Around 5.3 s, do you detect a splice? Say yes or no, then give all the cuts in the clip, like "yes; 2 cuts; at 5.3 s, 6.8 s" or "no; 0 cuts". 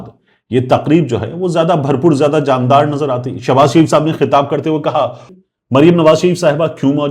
yes; 1 cut; at 5.3 s